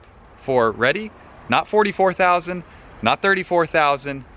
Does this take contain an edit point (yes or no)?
no